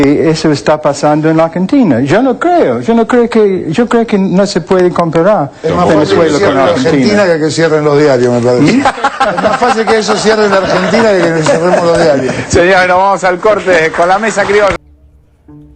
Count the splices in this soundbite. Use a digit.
1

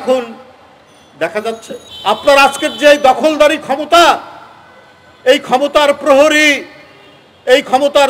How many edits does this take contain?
1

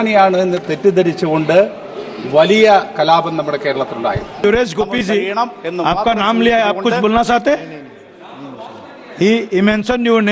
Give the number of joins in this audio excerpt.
1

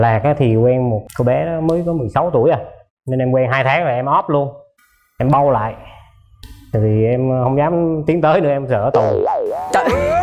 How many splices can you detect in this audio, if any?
1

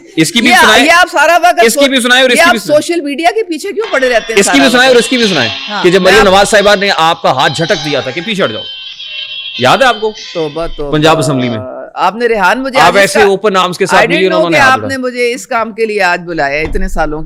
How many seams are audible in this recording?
0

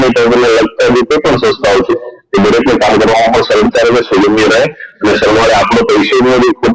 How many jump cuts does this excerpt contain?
0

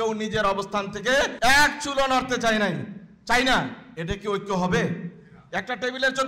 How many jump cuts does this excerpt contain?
1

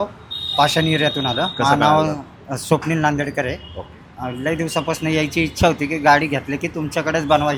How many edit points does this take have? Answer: 0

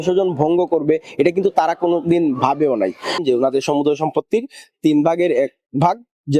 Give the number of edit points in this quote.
1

